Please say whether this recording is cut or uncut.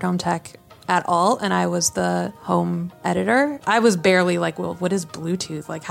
cut